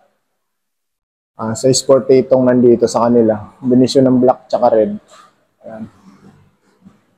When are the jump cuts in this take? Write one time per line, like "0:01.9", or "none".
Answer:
none